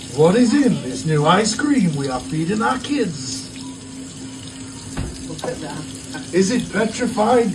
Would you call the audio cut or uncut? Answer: uncut